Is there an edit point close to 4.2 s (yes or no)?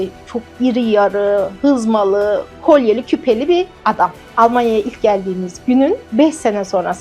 yes